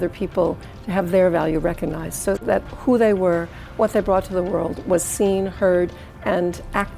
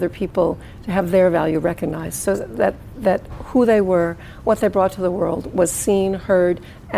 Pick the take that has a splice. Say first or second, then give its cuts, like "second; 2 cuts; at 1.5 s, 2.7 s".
first; 1 cut; at 2.5 s